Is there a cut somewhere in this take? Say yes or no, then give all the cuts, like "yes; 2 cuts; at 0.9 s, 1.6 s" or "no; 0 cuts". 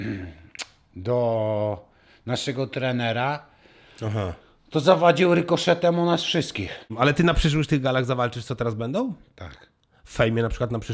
yes; 1 cut; at 6.8 s